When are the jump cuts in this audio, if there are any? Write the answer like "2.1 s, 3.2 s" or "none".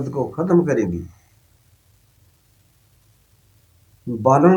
none